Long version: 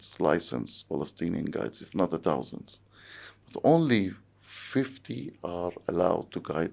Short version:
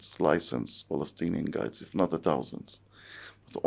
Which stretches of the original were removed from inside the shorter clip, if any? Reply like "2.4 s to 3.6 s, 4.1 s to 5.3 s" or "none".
none